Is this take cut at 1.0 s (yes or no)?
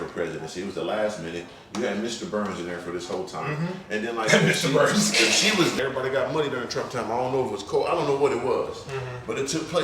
no